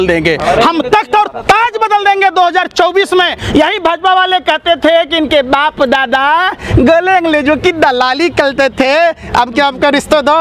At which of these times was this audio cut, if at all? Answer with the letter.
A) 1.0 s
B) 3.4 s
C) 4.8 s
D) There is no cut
B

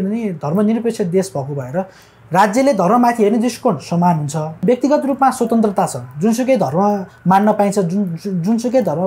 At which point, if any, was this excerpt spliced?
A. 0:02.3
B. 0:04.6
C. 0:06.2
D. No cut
B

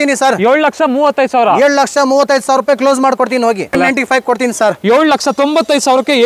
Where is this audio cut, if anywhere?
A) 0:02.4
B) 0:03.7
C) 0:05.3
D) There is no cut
B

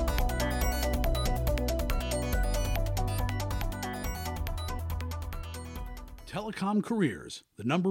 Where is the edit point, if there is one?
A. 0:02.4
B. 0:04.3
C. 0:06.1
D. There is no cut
C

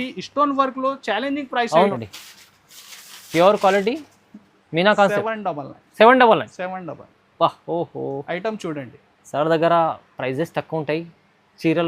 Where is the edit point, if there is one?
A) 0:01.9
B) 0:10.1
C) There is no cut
A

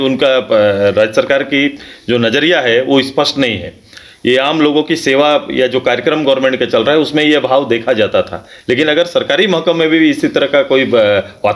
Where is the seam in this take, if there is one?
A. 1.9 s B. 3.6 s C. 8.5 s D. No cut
D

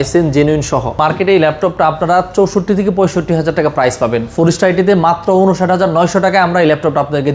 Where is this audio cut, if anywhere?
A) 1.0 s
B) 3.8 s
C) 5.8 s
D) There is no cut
A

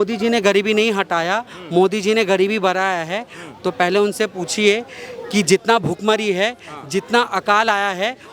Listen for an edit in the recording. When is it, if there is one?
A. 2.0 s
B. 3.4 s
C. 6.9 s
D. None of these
D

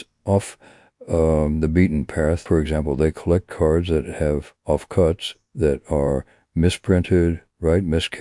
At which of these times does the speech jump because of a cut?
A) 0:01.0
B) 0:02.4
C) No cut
B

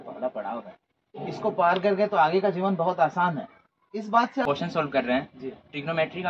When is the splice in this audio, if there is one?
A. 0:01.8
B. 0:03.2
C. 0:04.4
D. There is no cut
C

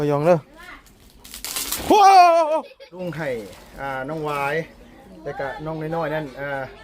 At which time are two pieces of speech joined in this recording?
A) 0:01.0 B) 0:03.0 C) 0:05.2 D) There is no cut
B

